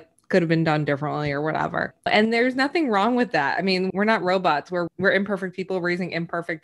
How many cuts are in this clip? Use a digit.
3